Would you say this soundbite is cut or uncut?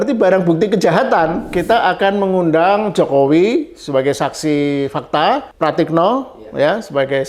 cut